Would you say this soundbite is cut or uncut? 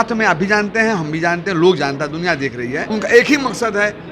cut